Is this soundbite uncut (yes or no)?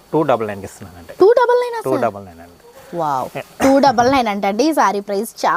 yes